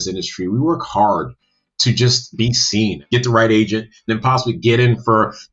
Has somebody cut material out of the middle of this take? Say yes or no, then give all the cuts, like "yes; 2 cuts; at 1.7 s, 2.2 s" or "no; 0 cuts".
yes; 2 cuts; at 3.0 s, 4.1 s